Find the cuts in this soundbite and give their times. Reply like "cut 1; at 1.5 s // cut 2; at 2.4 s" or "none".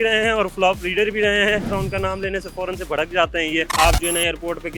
cut 1; at 1.7 s // cut 2; at 3.7 s